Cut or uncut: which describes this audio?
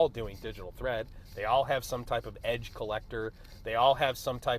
uncut